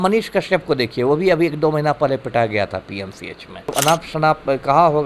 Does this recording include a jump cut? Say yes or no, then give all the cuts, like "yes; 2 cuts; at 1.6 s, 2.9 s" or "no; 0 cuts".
yes; 1 cut; at 3.7 s